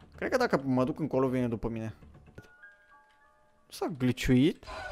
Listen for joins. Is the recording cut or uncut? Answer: cut